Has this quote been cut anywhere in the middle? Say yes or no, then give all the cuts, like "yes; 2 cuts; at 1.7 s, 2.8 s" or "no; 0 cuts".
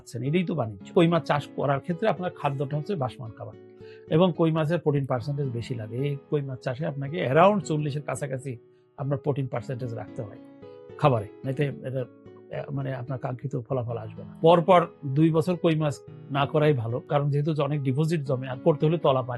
yes; 2 cuts; at 0.9 s, 14.2 s